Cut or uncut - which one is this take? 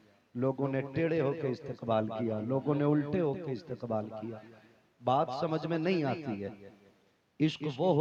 uncut